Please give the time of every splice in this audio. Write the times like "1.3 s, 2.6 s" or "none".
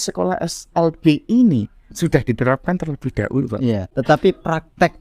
3.9 s